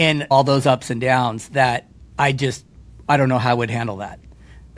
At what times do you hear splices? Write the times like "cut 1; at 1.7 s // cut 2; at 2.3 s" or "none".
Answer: none